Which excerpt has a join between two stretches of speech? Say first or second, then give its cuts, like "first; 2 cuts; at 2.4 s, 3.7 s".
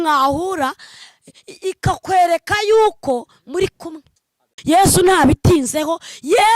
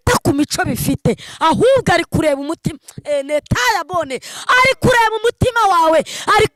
first; 1 cut; at 4.5 s